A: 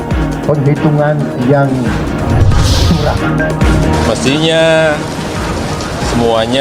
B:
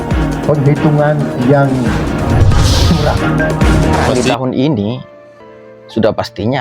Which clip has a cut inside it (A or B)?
B